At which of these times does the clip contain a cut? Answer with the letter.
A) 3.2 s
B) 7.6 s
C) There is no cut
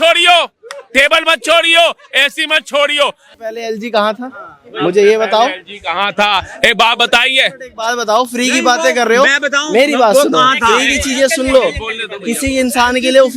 A